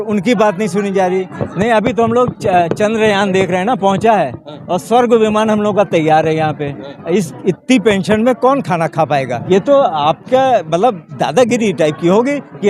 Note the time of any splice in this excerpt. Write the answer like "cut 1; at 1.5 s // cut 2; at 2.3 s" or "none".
cut 1; at 1.4 s // cut 2; at 9.3 s